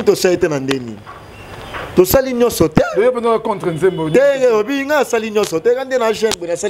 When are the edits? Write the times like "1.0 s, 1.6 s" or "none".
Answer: none